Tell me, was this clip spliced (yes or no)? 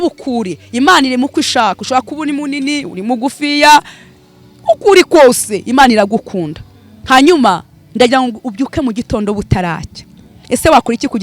no